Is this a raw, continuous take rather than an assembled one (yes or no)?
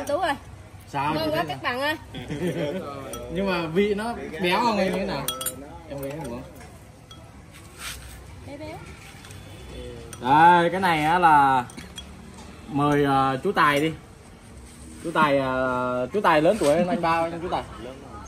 yes